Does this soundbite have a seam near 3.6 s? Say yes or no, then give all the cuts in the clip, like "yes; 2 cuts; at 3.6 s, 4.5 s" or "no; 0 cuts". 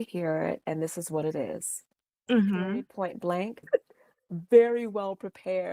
yes; 1 cut; at 3.6 s